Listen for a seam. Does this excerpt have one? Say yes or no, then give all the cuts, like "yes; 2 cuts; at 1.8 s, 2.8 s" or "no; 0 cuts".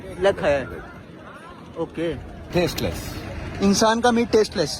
yes; 1 cut; at 2.4 s